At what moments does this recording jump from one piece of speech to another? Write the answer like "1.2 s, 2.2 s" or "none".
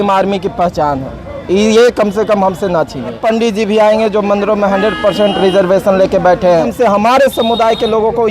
3.2 s, 6.7 s